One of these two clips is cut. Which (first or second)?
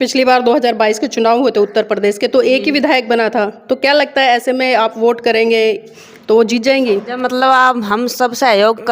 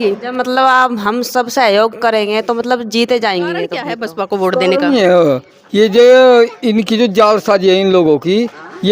second